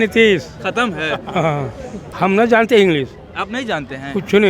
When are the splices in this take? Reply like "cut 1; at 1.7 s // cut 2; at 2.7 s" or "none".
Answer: cut 1; at 2.1 s